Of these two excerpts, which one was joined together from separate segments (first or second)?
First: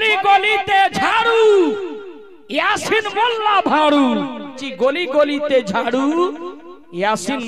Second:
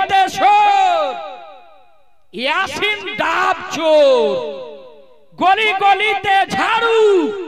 first